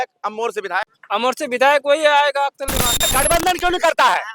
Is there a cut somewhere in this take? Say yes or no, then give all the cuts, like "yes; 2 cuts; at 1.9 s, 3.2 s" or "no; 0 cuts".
yes; 2 cuts; at 1.0 s, 3.1 s